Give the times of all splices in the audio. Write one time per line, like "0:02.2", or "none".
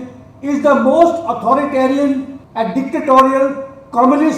0:02.4